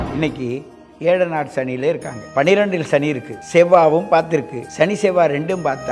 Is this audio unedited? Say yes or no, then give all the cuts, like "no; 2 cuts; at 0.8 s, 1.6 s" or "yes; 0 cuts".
no; 3 cuts; at 2.2 s, 3.3 s, 4.6 s